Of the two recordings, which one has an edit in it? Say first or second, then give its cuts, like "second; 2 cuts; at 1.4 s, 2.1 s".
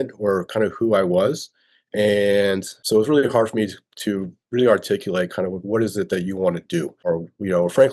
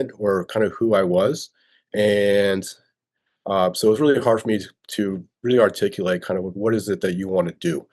first; 2 cuts; at 2.8 s, 7.0 s